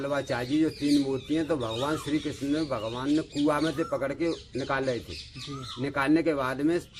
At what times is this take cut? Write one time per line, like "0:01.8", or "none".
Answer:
none